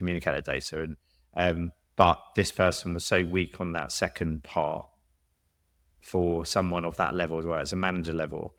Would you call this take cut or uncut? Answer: uncut